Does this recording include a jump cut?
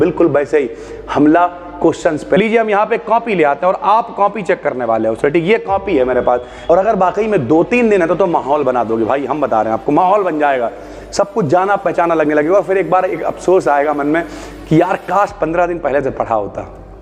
yes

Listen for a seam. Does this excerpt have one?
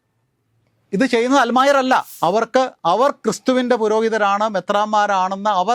yes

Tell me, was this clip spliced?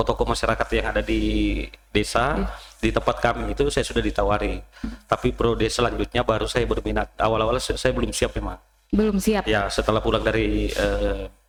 no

